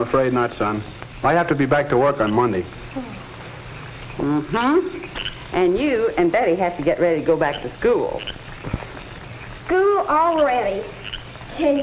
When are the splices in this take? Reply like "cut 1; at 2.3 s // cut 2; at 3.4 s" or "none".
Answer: cut 1; at 4.0 s